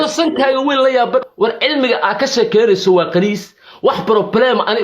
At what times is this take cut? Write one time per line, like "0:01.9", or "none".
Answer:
0:01.3